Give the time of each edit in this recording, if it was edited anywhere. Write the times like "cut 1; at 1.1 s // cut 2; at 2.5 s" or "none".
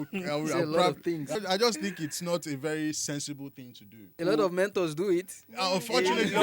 cut 1; at 1.4 s // cut 2; at 4.1 s